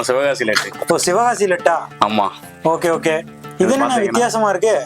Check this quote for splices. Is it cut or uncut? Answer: uncut